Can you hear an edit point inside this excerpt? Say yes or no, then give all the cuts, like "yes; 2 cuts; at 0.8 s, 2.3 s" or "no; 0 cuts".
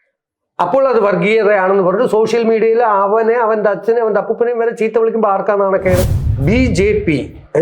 yes; 1 cut; at 6.2 s